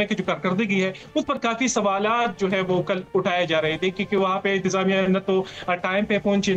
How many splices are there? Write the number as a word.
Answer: zero